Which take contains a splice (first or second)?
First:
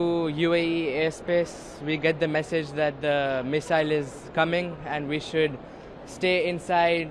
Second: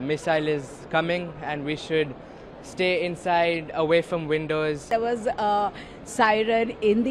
second